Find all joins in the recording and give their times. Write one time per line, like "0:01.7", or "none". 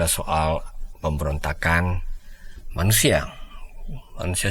none